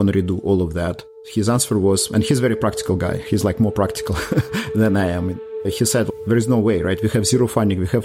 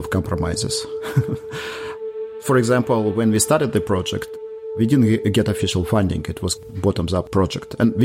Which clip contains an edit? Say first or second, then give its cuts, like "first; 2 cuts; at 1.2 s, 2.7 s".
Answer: first; 2 cuts; at 1.0 s, 5.5 s